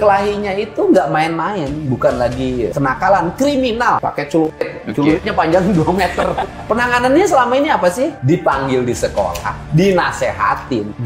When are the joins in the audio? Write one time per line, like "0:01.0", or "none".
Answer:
none

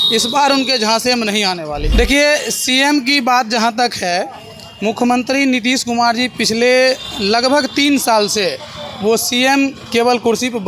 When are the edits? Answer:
0:01.9

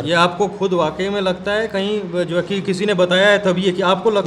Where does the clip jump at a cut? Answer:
none

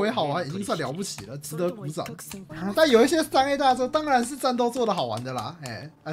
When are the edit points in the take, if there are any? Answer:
0:02.4

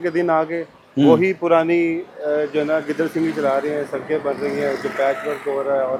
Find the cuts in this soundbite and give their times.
none

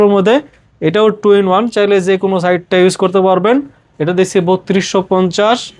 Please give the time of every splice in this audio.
none

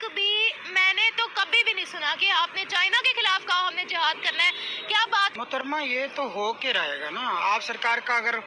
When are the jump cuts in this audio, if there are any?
0:05.3

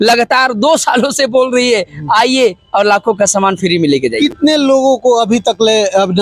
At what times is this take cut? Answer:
none

